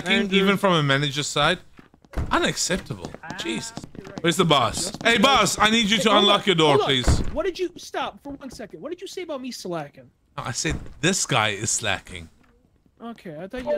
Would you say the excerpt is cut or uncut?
cut